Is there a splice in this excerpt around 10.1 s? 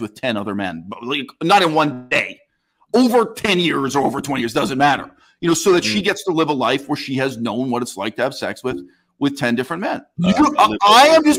yes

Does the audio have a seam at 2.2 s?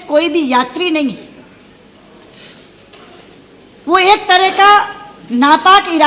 no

